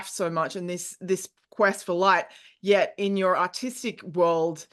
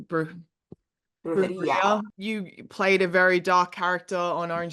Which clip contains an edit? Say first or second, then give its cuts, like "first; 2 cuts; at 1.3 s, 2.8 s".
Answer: second; 1 cut; at 2.1 s